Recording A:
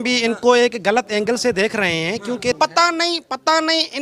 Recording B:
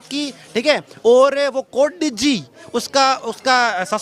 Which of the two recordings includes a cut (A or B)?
A